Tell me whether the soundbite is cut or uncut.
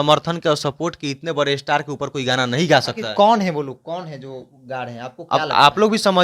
uncut